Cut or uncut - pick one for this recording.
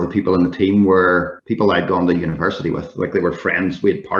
cut